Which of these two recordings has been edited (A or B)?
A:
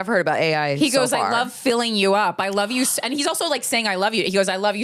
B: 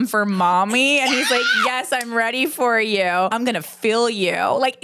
B